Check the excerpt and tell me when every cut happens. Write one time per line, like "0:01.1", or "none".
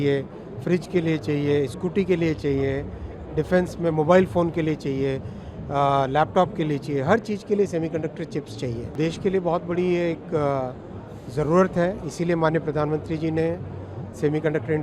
0:08.9